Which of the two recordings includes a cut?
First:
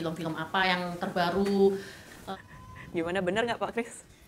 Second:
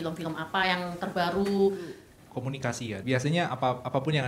second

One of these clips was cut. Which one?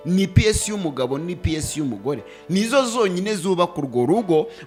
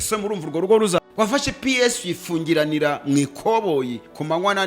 second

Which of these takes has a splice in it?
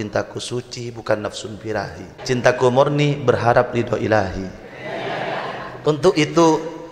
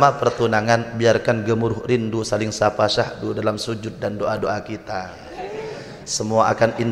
first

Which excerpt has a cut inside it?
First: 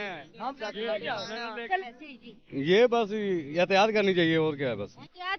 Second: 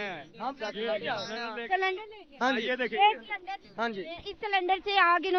first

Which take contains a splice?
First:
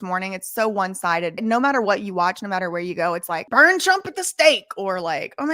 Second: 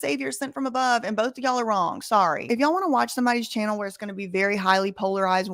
first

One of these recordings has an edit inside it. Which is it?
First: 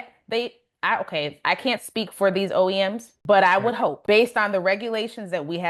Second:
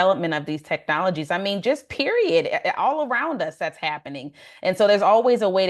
first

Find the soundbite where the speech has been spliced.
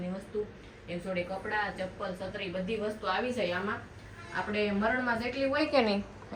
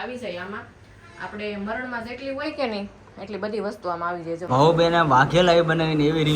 second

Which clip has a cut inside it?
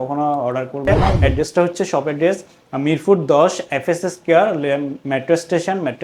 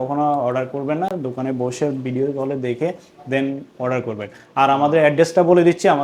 first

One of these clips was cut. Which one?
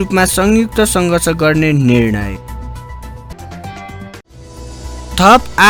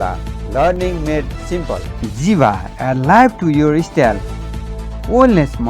second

